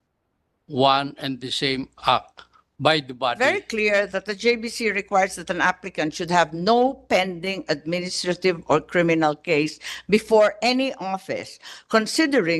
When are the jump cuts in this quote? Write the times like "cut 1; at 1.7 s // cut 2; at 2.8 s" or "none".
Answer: cut 1; at 3.4 s